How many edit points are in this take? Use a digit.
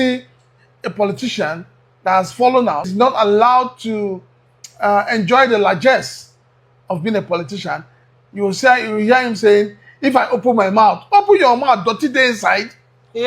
1